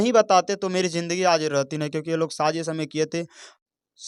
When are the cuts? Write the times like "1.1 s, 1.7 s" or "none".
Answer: none